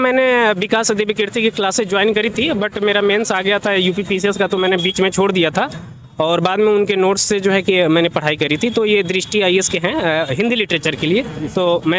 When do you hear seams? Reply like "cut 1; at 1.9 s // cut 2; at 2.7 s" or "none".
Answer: none

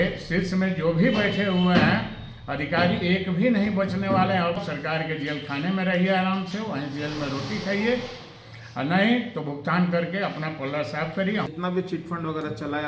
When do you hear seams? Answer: cut 1; at 4.6 s // cut 2; at 11.5 s

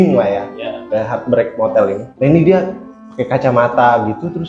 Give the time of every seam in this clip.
cut 1; at 2.1 s

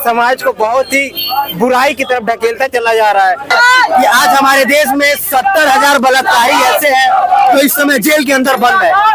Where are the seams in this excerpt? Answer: cut 1; at 3.5 s

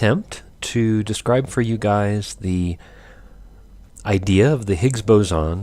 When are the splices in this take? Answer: cut 1; at 2.1 s

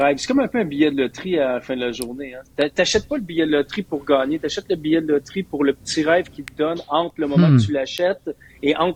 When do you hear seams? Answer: none

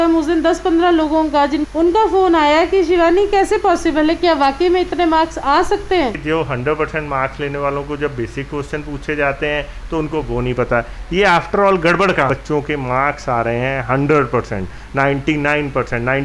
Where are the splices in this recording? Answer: cut 1; at 1.7 s // cut 2; at 6.2 s // cut 3; at 12.3 s

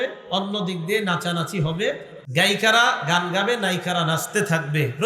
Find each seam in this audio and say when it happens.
cut 1; at 2.1 s

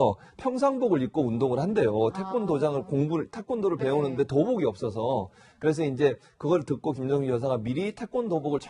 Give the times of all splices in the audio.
cut 1; at 2.4 s

